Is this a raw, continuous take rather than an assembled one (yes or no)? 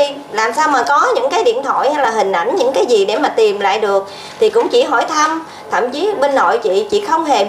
yes